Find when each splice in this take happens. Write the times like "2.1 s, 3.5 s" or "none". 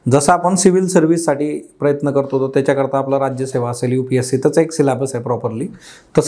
none